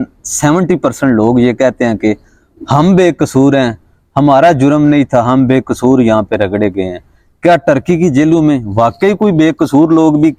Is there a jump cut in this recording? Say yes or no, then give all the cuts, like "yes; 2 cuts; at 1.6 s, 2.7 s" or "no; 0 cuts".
no; 0 cuts